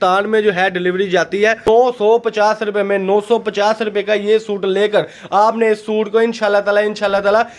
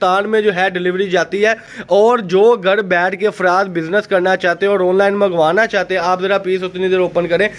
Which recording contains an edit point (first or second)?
first